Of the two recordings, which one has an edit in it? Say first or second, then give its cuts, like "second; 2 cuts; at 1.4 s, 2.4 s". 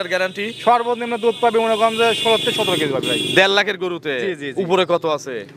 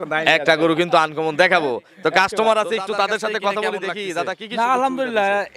second; 1 cut; at 4.4 s